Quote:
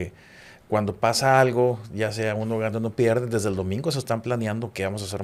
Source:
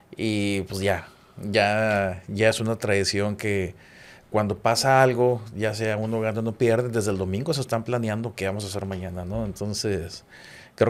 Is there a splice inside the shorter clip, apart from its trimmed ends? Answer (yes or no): no